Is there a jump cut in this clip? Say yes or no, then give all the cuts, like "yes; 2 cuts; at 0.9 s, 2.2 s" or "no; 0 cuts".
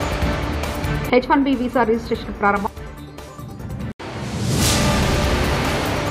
yes; 1 cut; at 1.0 s